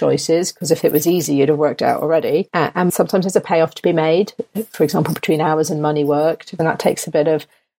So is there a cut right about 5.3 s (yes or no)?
no